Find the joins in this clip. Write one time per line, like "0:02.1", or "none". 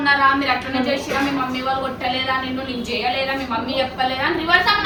none